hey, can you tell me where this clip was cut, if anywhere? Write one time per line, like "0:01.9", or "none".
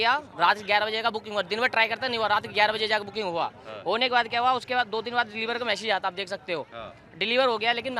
none